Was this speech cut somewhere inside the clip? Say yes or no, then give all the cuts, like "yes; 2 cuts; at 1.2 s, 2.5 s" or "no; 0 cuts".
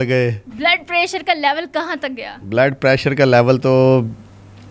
no; 0 cuts